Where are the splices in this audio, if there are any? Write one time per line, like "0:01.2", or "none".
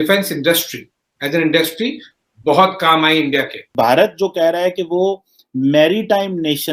0:03.7